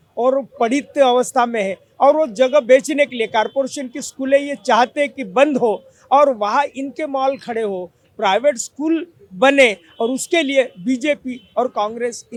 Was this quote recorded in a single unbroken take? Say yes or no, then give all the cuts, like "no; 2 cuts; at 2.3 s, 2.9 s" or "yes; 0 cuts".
yes; 0 cuts